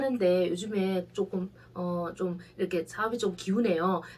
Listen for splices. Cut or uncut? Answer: uncut